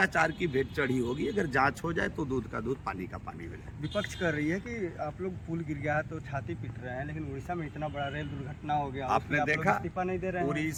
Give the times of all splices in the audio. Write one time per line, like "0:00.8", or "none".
none